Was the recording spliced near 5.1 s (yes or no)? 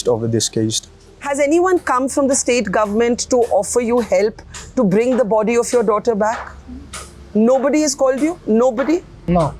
no